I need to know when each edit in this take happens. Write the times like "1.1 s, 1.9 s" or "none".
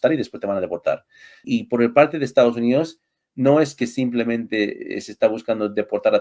1.4 s